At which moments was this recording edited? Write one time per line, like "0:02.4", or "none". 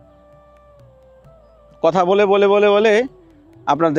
none